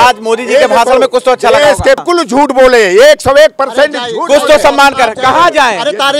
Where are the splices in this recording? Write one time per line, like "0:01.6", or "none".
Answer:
0:02.0